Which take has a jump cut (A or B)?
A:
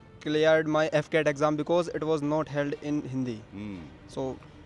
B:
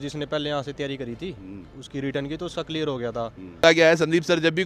B